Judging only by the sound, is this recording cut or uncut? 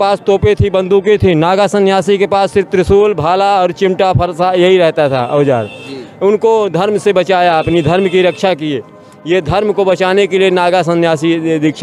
uncut